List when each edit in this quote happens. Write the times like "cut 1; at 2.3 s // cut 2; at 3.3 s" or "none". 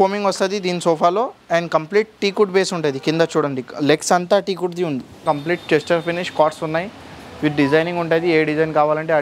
cut 1; at 5.2 s